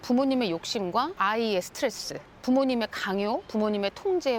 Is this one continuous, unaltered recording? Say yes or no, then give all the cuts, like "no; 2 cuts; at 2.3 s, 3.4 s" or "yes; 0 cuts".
no; 1 cut; at 1.1 s